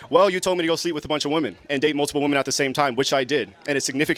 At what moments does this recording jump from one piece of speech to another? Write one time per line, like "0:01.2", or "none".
none

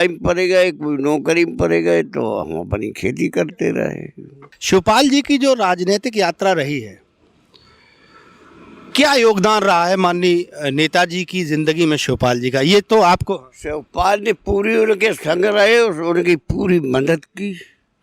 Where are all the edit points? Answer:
0:04.5

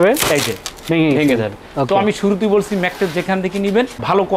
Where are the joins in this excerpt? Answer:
none

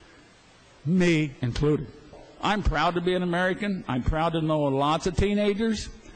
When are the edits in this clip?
0:02.3

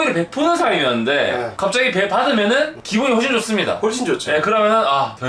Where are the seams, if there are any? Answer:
none

